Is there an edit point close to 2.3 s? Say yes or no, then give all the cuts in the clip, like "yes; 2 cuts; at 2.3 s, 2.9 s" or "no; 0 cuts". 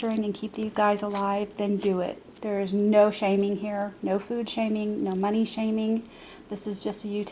yes; 1 cut; at 2.3 s